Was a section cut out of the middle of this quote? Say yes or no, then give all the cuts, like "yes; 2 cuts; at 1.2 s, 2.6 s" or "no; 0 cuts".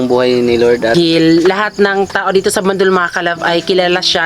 yes; 1 cut; at 0.9 s